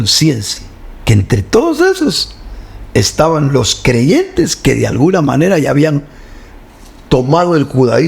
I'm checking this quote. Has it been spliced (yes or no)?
no